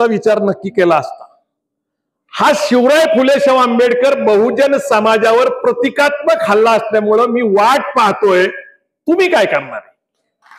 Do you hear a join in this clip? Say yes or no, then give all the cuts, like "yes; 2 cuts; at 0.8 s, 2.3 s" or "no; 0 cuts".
no; 0 cuts